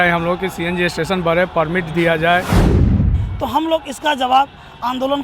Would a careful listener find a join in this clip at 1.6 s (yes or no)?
no